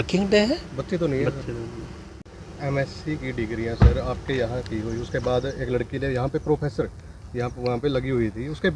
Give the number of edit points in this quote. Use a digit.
1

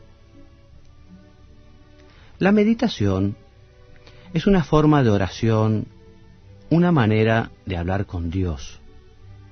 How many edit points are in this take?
1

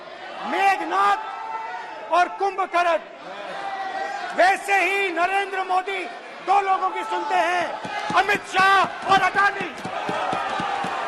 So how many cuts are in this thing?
0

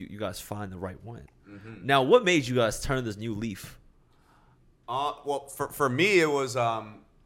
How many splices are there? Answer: 0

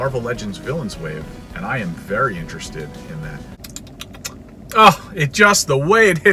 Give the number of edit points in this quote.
1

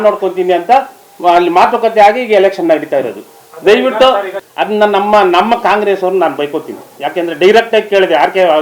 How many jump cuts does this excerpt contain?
1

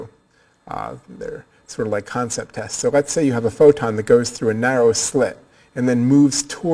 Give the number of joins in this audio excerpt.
0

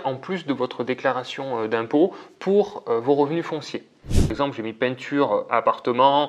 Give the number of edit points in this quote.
1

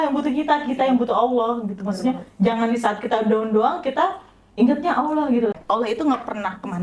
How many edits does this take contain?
1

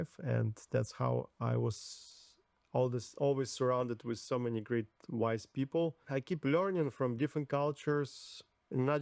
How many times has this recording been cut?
1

